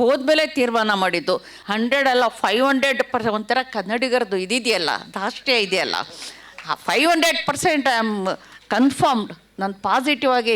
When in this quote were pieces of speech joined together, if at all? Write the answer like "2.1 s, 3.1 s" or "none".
1.5 s